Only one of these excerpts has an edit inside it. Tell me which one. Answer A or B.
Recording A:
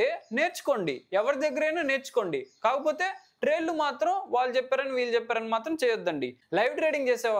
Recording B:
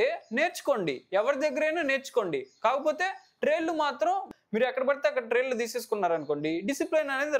B